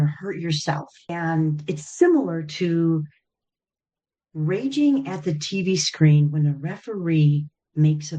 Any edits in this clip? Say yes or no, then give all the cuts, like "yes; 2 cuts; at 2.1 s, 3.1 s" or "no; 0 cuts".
yes; 1 cut; at 1.1 s